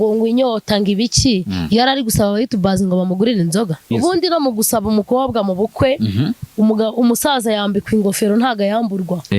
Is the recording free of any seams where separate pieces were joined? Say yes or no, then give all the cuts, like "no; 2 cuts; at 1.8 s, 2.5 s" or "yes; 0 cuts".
no; 1 cut; at 3.9 s